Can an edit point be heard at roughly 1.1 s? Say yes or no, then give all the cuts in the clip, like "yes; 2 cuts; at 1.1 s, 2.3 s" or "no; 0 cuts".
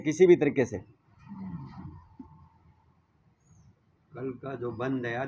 no; 0 cuts